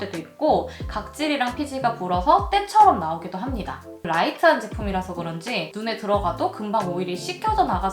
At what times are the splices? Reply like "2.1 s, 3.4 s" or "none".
3.9 s

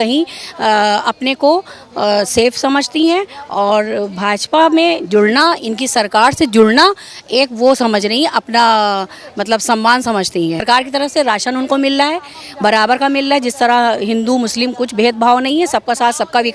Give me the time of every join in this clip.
10.6 s

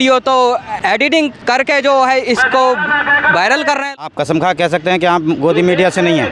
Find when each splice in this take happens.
3.9 s

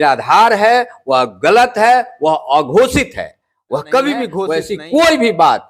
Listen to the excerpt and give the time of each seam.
4.4 s

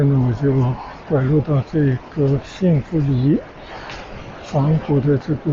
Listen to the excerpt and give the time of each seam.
none

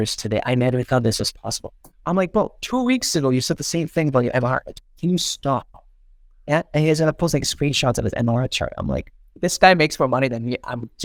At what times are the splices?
none

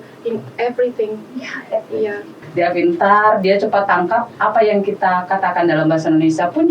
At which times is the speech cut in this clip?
2.4 s

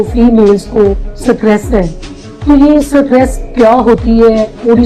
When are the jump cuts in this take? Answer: none

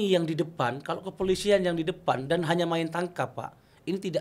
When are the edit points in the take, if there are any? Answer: none

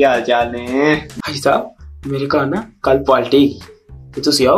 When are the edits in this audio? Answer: 1.2 s

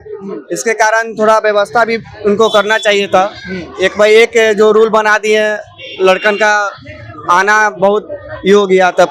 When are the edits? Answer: none

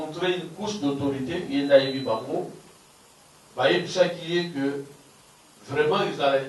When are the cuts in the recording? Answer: none

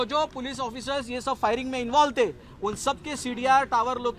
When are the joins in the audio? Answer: none

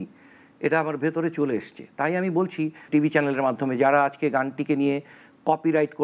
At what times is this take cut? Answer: none

